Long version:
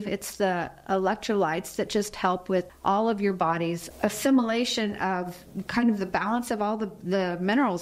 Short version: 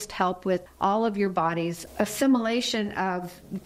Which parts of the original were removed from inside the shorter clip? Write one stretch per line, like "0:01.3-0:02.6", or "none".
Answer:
none

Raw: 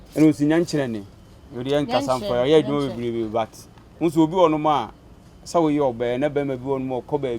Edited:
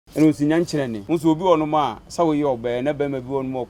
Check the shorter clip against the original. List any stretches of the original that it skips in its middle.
0:01.0-0:03.9
0:04.9-0:05.4

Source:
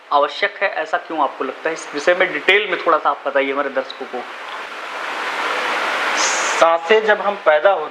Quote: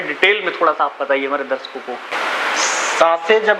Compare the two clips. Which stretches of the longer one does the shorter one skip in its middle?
0:04.4-0:05.7

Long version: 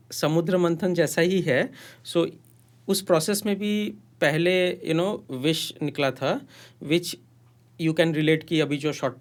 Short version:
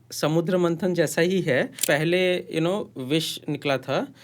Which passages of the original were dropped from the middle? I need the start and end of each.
0:01.8-0:04.1

